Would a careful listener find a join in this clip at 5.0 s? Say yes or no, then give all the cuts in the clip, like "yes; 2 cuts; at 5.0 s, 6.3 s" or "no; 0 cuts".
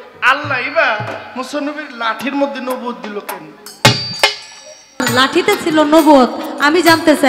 yes; 1 cut; at 5.0 s